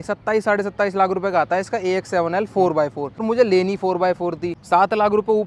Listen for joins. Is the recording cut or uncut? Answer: cut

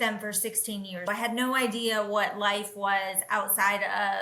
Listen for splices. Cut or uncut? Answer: uncut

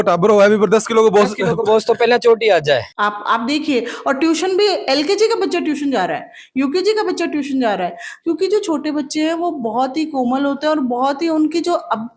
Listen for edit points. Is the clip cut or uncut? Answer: cut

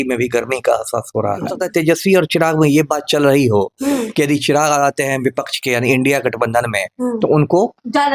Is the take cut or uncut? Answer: cut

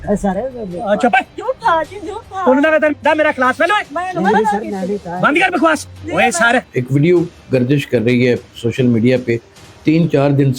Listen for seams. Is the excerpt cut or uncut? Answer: cut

